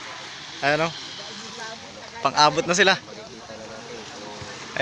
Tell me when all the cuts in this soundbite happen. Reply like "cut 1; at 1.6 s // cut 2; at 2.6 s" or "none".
none